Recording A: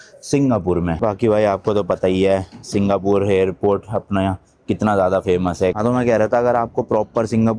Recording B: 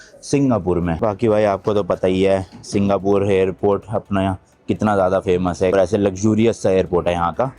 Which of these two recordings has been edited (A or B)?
A